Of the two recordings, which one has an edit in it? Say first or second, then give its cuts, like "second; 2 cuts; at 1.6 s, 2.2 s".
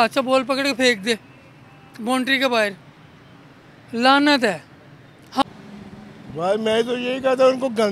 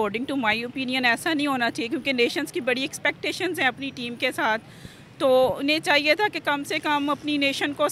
first; 1 cut; at 5.4 s